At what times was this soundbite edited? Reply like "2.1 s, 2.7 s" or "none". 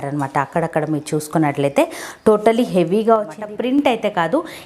3.4 s